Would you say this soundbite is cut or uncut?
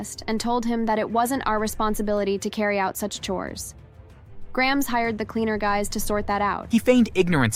cut